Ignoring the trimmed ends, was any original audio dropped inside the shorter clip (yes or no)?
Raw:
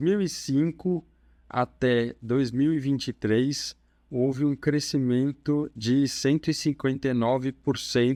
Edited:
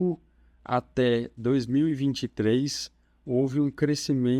no